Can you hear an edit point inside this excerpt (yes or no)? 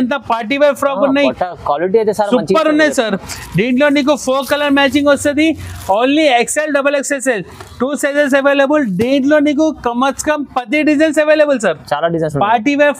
no